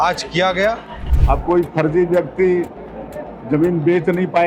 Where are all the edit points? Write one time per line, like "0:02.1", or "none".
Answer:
0:01.0